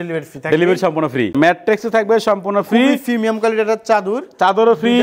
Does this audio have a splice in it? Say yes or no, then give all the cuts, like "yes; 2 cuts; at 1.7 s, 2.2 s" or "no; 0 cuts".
yes; 1 cut; at 1.3 s